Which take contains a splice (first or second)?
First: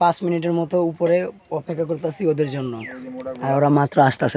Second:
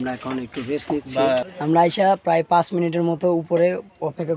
second